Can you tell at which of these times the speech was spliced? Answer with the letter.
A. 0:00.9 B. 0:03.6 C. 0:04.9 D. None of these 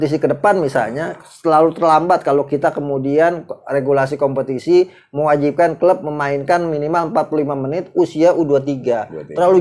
D